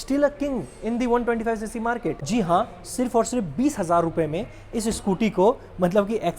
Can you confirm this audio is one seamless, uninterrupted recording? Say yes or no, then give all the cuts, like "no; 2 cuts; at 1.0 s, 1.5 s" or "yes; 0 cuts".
no; 1 cut; at 2.2 s